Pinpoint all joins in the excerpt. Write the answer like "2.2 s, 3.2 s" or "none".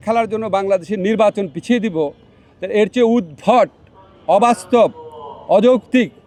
none

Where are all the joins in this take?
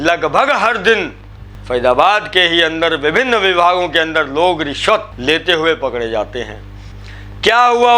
1.5 s

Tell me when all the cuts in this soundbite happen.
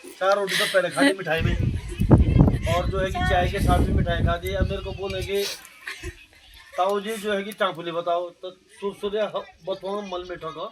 none

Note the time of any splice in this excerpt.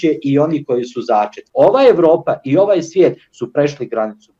1.4 s

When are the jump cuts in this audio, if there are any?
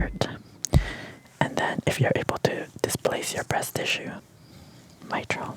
4.2 s

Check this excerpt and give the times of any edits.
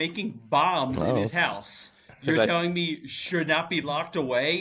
none

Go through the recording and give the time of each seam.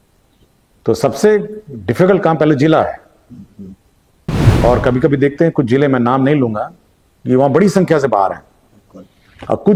none

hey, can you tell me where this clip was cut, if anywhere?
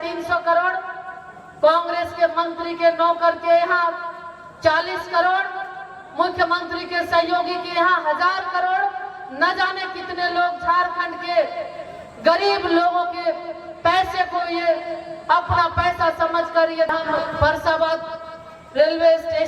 16.9 s

